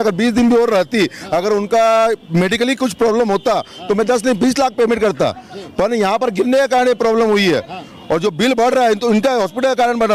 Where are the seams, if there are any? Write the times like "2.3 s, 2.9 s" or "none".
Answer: none